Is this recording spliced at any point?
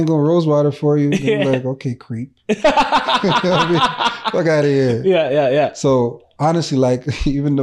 no; 0 cuts

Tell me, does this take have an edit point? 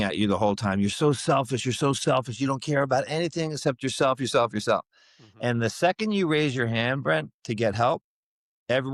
no; 0 cuts

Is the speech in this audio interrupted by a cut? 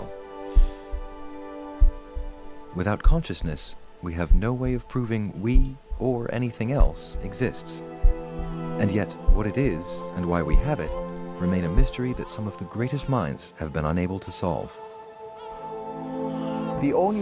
no; 0 cuts

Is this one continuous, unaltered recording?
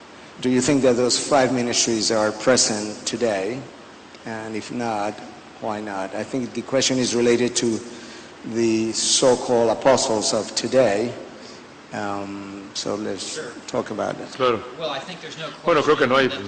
no; 1 cut; at 14.7 s

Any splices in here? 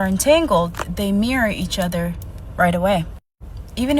no; 0 cuts

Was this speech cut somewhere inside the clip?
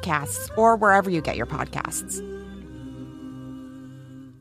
yes; 1 cut; at 1.9 s

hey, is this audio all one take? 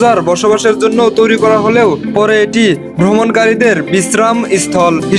yes; 0 cuts

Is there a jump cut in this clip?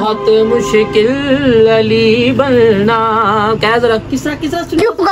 yes; 1 cut; at 3.4 s

